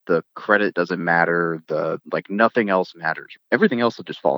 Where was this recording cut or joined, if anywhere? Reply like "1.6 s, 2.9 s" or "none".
3.4 s